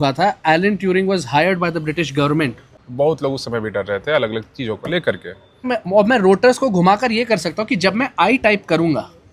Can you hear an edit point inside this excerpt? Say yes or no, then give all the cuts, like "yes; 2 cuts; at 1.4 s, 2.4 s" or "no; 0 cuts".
yes; 2 cuts; at 2.7 s, 5.7 s